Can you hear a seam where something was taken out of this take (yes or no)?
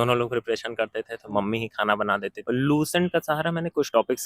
yes